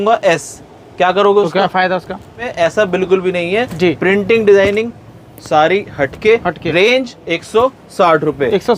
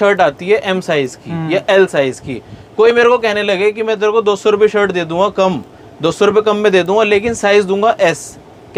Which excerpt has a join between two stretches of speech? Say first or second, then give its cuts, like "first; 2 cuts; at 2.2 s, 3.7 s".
first; 1 cut; at 2.4 s